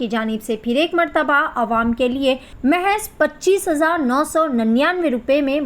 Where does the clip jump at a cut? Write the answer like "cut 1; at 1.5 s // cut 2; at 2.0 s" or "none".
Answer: cut 1; at 2.5 s

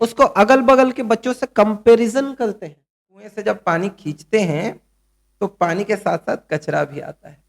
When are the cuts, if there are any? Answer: cut 1; at 3.4 s

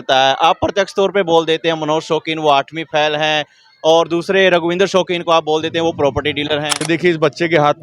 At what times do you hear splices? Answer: cut 1; at 6.8 s

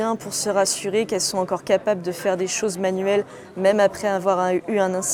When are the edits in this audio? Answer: none

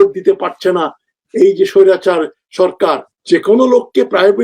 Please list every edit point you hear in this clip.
cut 1; at 3.1 s

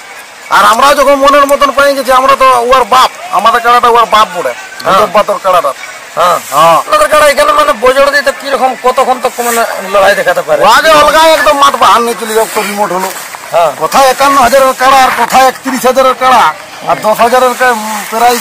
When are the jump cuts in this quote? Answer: cut 1; at 6.9 s // cut 2; at 13.2 s

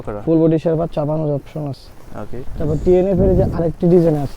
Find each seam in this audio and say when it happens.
none

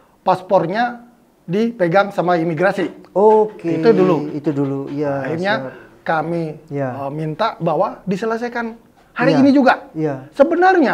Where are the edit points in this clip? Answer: none

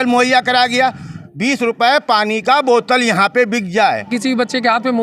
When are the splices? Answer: cut 1; at 1.2 s // cut 2; at 4.1 s

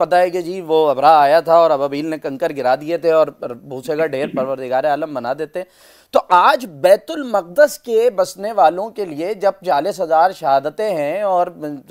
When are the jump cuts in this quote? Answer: none

